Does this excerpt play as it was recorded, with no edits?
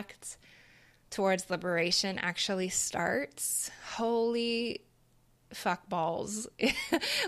yes; 0 cuts

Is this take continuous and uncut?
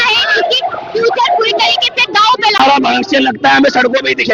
no; 1 cut; at 2.6 s

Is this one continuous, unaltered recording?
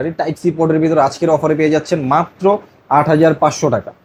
yes; 0 cuts

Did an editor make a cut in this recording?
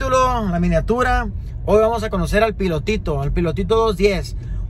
no; 0 cuts

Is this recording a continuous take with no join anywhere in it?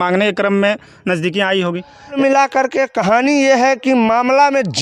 no; 1 cut; at 2.2 s

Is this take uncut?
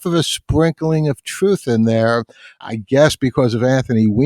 no; 1 cut; at 2.6 s

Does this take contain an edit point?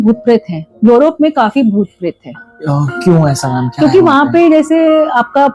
no; 0 cuts

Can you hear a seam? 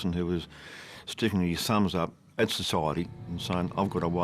yes; 1 cut; at 3.1 s

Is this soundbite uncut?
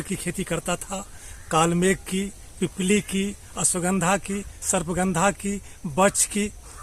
yes; 0 cuts

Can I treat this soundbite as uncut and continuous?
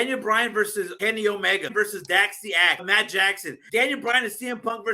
no; 3 cuts; at 0.9 s, 1.7 s, 3.2 s

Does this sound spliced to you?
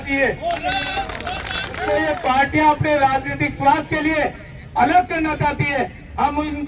yes; 1 cut; at 1.8 s

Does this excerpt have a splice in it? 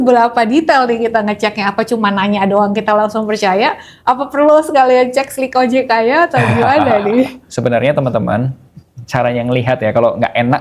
yes; 1 cut; at 7.5 s

